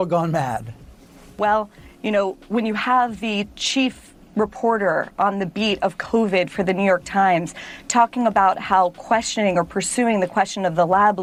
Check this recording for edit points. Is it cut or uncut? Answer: uncut